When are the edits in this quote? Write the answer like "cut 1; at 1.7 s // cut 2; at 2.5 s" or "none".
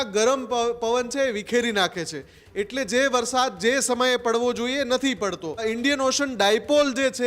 cut 1; at 5.6 s